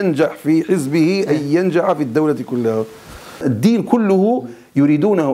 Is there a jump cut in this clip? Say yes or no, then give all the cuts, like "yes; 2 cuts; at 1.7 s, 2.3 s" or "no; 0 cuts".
yes; 1 cut; at 3.4 s